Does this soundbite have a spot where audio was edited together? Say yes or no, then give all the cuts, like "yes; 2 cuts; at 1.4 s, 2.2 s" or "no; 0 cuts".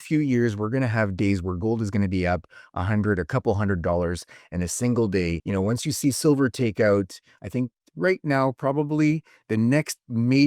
yes; 1 cut; at 5.4 s